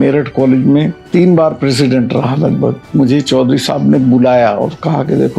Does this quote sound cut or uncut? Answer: cut